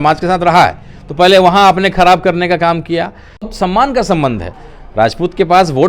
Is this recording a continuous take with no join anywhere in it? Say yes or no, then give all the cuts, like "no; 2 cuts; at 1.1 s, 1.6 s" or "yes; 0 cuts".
no; 1 cut; at 3.5 s